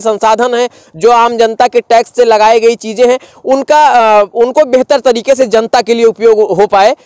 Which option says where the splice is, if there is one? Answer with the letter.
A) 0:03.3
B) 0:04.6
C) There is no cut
C